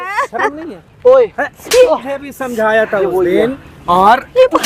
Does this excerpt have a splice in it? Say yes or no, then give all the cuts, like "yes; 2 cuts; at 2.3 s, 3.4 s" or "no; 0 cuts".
no; 0 cuts